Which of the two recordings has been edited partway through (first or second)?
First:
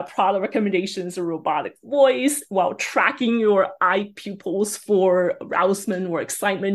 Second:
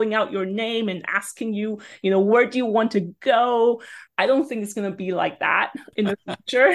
second